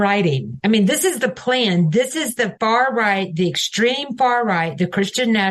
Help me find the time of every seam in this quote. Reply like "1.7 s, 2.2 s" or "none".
none